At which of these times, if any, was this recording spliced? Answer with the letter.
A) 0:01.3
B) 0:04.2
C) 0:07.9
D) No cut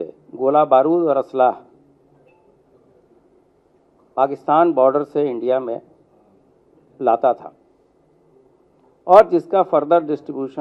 D